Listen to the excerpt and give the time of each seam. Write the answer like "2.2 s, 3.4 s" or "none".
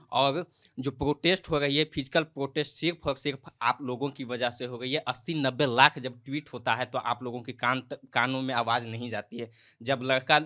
none

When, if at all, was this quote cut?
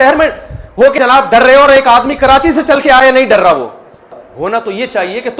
1.0 s, 4.2 s

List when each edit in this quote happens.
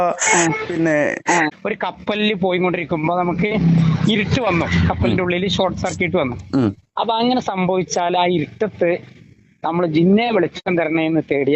1.5 s

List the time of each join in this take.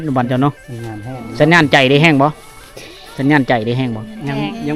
none

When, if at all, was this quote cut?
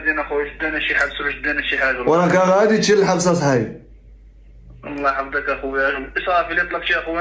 none

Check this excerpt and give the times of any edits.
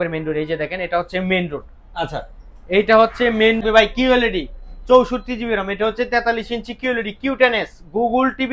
3.6 s

